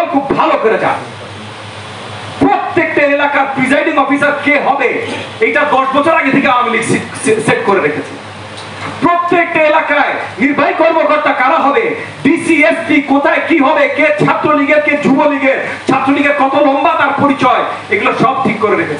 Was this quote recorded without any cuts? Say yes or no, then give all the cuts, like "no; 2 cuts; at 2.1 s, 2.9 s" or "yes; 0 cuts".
yes; 0 cuts